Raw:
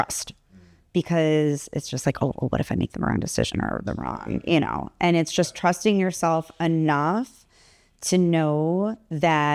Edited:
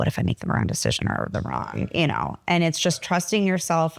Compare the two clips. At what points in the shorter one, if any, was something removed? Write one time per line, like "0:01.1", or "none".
none